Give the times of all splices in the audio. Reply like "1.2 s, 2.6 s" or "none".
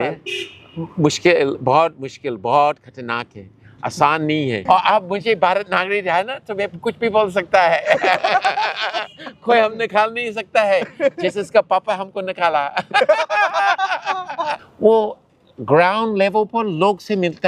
4.6 s, 14.6 s